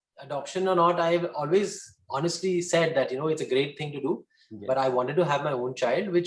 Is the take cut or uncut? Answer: uncut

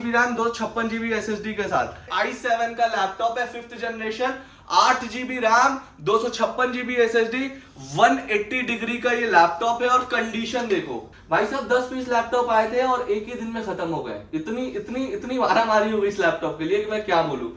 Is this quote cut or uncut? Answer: cut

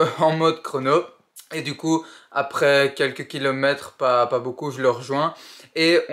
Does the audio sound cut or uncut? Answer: uncut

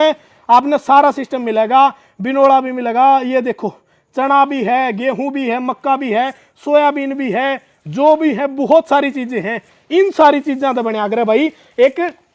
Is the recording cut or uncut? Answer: uncut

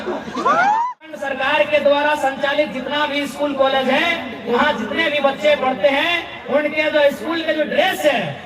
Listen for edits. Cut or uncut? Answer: cut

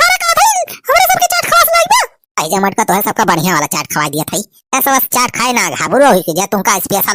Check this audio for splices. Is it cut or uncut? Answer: uncut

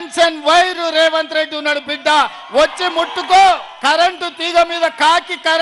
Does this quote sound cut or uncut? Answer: cut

